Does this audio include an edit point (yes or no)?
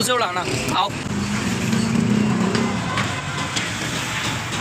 yes